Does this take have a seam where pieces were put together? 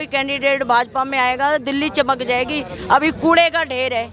no; 0 cuts

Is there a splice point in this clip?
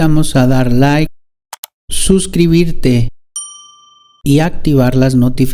no; 0 cuts

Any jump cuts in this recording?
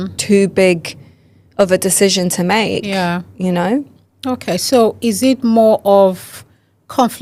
no; 0 cuts

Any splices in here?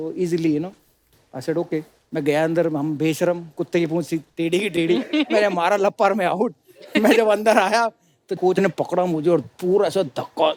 no; 0 cuts

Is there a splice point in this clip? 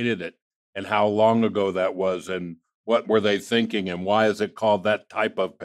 no; 0 cuts

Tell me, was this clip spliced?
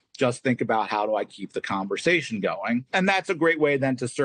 yes; 1 cut; at 2.9 s

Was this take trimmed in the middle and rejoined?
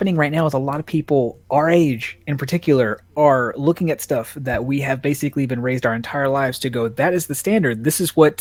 no; 0 cuts

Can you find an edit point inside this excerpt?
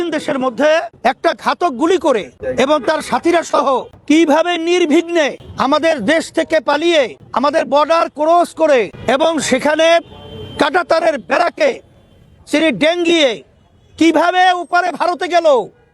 yes; 6 cuts; at 0.9 s, 2.4 s, 3.9 s, 5.5 s, 7.2 s, 8.9 s

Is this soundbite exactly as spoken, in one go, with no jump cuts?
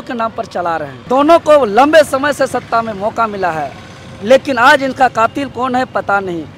no; 1 cut; at 1.0 s

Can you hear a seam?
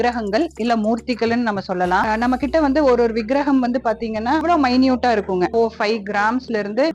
no; 0 cuts

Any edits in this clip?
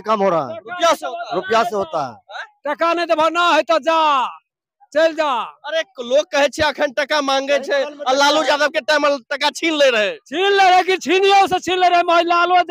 no; 0 cuts

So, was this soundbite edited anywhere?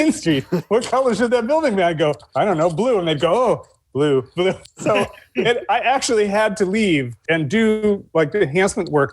yes; 1 cut; at 4.7 s

